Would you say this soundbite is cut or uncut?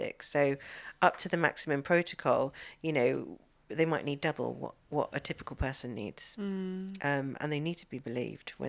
uncut